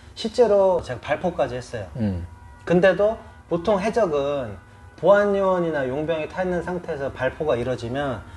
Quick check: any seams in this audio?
yes; 1 cut; at 0.9 s

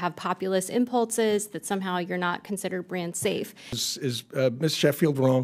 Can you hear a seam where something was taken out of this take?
yes; 1 cut; at 3.8 s

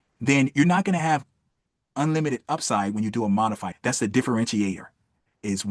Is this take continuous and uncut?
no; 1 cut; at 3.6 s

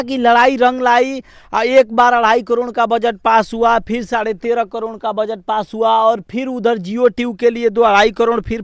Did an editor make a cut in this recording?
no; 0 cuts

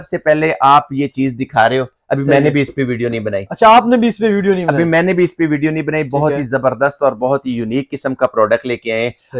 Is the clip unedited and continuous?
yes; 0 cuts

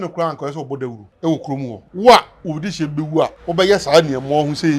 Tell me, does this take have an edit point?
yes; 3 cuts; at 1.1 s, 1.8 s, 3.4 s

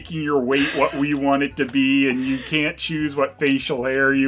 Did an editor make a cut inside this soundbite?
no; 0 cuts

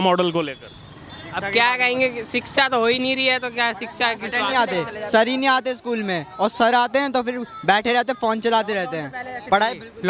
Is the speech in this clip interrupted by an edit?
no; 0 cuts

